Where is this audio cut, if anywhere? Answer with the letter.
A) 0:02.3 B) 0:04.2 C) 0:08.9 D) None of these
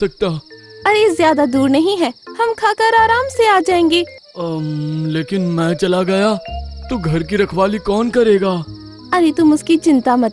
B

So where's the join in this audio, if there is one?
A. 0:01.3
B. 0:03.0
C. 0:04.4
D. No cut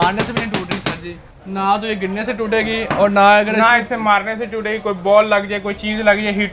A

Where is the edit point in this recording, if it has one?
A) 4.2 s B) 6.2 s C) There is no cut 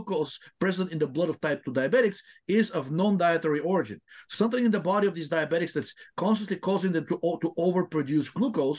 A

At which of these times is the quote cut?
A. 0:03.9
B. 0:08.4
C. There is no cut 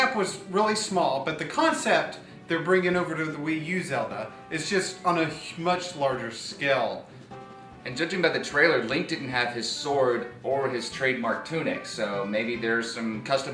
A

